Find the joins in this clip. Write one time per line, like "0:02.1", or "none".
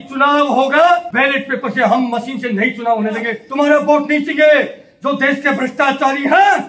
0:01.1
0:03.4